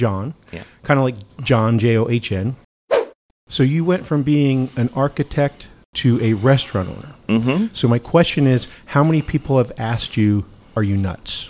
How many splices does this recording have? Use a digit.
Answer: 1